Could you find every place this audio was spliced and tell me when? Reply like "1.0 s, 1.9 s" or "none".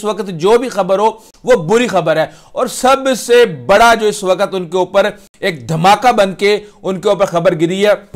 none